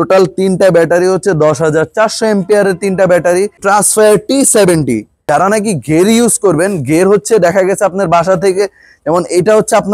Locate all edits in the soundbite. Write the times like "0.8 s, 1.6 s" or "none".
3.6 s, 5.1 s